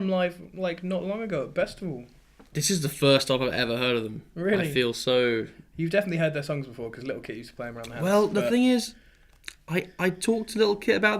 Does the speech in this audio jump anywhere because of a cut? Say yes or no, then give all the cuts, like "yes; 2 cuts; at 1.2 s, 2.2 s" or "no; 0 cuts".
yes; 1 cut; at 8.0 s